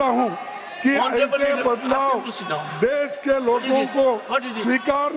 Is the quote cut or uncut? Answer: uncut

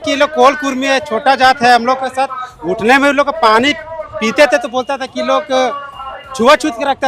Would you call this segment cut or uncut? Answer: uncut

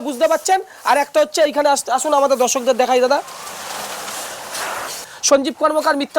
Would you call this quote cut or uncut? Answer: cut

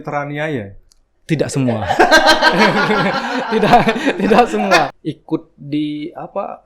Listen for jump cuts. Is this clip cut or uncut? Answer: cut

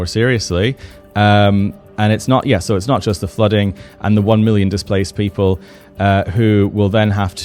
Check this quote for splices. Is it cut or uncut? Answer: uncut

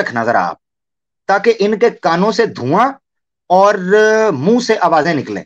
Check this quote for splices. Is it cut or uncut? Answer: uncut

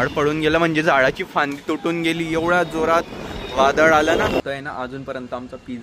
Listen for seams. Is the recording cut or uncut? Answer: cut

